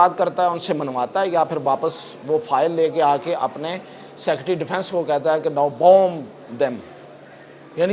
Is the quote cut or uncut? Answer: uncut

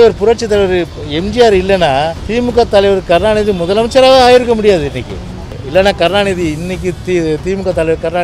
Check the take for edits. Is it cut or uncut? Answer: cut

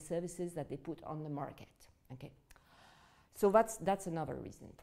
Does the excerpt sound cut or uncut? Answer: uncut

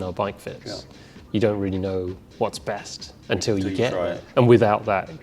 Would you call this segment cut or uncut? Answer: cut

